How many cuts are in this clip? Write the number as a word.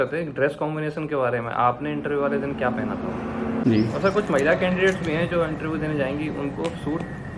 one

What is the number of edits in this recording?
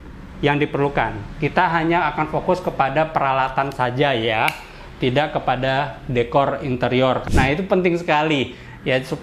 one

